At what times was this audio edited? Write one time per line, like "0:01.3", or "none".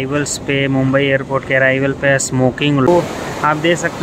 0:02.9